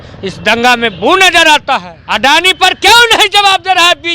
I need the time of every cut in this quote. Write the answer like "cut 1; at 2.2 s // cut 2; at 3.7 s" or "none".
cut 1; at 2.0 s